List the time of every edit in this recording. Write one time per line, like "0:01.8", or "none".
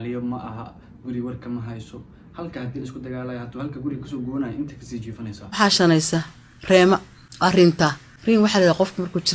0:05.4